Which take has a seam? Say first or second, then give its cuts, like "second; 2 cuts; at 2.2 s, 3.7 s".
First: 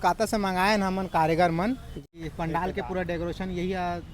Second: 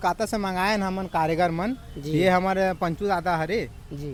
first; 1 cut; at 2.0 s